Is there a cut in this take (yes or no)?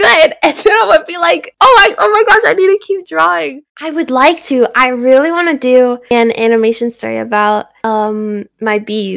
yes